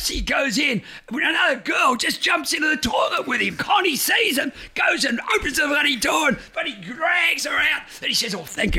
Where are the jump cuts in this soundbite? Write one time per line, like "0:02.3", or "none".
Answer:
0:03.6